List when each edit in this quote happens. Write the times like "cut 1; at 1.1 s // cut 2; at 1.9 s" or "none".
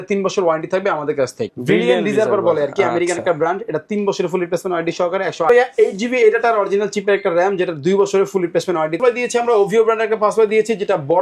cut 1; at 1.5 s // cut 2; at 5.5 s // cut 3; at 9.0 s